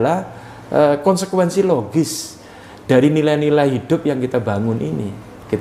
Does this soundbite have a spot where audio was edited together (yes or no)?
no